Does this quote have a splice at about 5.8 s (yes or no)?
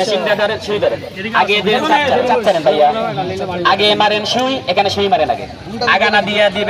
no